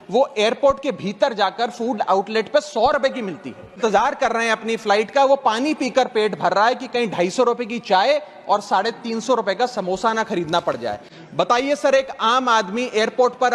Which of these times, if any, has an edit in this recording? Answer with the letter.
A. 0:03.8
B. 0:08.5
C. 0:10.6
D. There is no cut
A